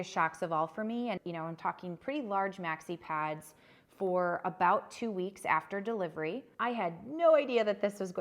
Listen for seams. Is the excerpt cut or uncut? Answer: cut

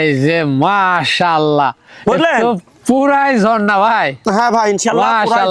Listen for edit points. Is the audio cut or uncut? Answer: uncut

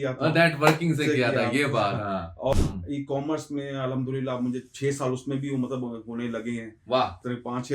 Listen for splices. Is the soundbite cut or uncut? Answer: cut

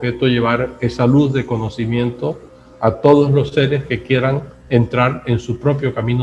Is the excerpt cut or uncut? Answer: uncut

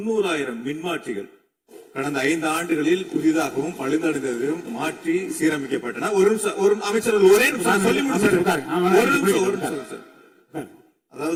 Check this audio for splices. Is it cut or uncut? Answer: uncut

